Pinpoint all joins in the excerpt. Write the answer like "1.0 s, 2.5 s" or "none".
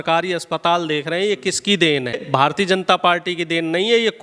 2.2 s